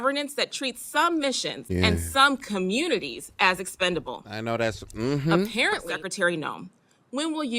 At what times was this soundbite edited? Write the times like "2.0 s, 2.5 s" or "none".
1.5 s, 6.0 s